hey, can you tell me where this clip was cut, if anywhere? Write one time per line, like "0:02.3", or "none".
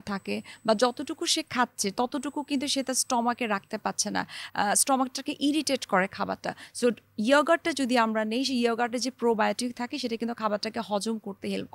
none

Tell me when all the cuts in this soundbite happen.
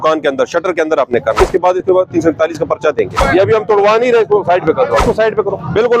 0:01.4
0:03.2
0:05.0

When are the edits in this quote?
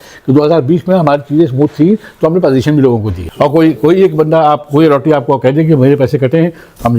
0:03.2

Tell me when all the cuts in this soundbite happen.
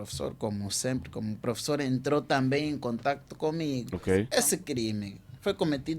0:04.3

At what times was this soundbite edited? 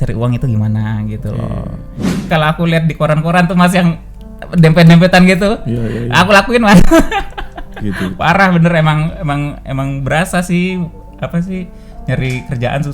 0:02.2

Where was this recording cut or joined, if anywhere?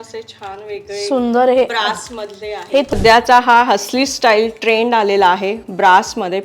0:02.9

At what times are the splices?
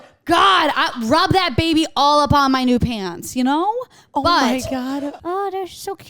0:05.2

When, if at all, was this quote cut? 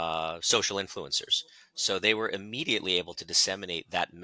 none

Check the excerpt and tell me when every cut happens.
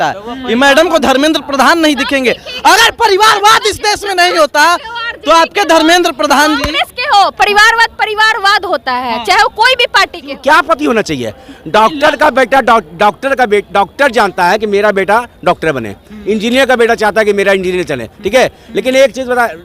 0:10.3

